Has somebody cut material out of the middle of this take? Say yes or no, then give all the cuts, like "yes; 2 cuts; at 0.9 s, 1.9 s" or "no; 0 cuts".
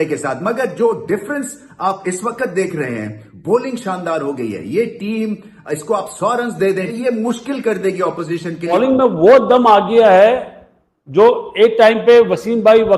yes; 1 cut; at 8.7 s